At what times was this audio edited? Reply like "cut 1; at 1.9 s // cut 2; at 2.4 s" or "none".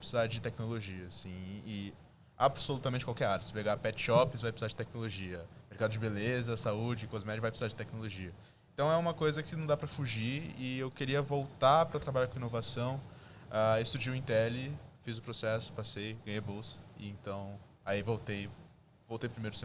none